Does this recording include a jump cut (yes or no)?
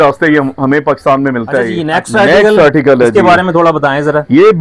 yes